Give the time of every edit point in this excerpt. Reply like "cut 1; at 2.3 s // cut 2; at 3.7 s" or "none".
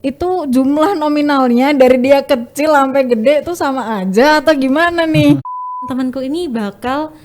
cut 1; at 5.8 s